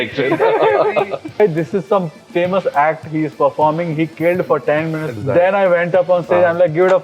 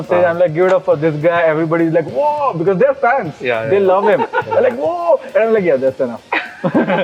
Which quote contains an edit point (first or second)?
first